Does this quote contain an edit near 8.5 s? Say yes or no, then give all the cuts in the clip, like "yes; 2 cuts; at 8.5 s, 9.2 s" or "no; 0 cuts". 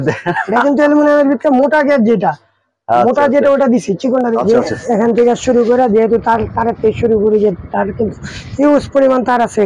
no; 1 cut; at 4.3 s